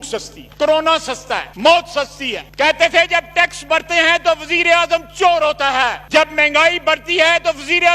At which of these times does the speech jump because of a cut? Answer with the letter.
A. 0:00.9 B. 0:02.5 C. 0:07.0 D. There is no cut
B